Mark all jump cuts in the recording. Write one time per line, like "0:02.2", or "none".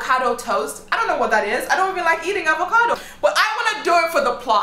0:02.9